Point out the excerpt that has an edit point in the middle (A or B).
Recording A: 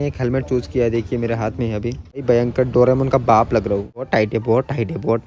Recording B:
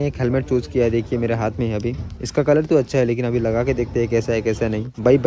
A